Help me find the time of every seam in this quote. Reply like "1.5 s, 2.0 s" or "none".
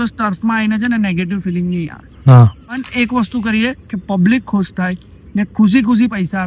2.8 s